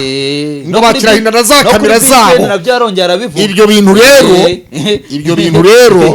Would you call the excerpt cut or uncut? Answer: uncut